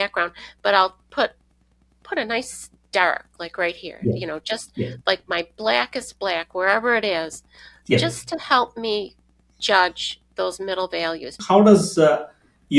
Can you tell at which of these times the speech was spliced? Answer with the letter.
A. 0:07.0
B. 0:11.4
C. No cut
B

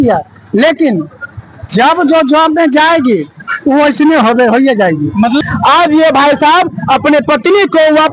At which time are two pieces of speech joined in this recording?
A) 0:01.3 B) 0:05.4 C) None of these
B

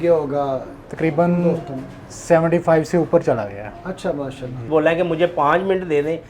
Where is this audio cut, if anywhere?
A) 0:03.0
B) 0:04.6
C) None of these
B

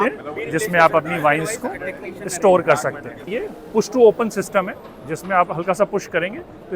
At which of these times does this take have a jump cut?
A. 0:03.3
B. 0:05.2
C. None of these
A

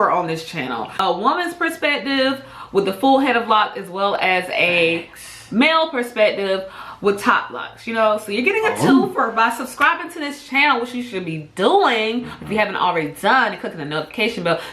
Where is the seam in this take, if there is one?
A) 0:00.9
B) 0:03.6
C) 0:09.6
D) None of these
A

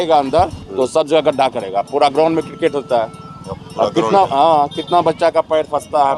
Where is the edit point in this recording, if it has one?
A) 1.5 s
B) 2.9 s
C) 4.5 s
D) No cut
D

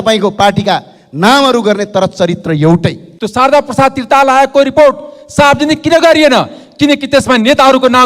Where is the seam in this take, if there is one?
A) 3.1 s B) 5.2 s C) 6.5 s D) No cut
A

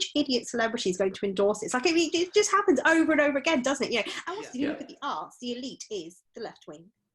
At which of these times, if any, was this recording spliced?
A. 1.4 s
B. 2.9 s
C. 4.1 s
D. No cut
C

